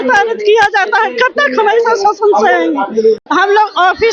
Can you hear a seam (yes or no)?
yes